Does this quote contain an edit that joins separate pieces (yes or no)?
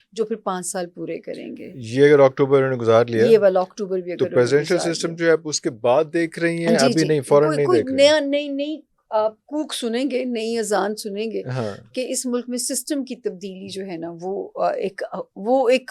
no